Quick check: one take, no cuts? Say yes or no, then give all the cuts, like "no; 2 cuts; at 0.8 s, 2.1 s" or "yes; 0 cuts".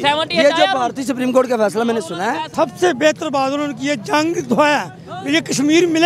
no; 1 cut; at 2.4 s